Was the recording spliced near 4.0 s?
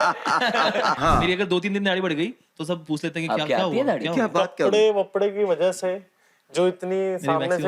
no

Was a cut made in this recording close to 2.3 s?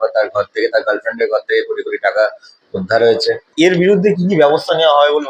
no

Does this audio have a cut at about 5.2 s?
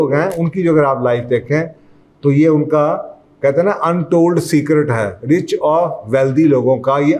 no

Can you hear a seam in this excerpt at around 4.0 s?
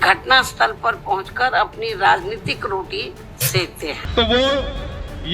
yes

